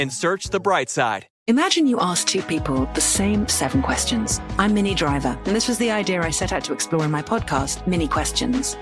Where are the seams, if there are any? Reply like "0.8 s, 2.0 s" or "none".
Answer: 1.3 s

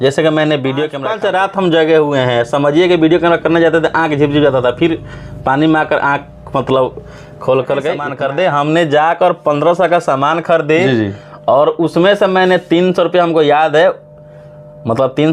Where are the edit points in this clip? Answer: 1.0 s, 8.1 s

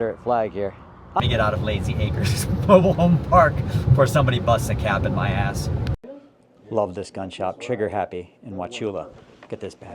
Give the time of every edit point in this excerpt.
1.2 s, 6.1 s

